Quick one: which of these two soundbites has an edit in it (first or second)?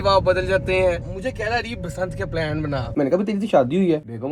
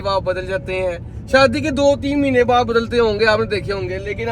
first